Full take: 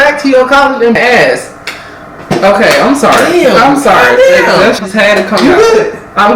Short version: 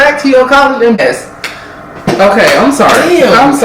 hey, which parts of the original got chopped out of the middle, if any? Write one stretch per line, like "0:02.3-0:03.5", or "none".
0:01.0-0:01.2